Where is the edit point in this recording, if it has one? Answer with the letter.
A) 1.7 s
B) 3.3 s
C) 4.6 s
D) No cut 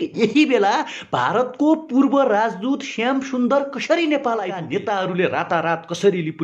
C